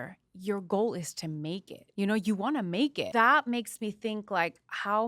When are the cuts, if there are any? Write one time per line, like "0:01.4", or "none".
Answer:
0:01.8
0:03.0